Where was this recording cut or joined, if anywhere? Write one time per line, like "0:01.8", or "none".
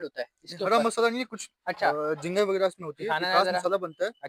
none